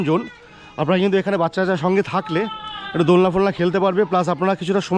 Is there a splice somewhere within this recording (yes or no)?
no